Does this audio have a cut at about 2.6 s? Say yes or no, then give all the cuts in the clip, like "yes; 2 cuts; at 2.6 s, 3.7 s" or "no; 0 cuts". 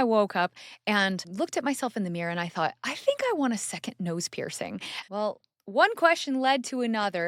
no; 2 cuts; at 1.3 s, 4.9 s